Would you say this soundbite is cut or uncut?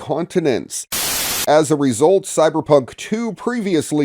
cut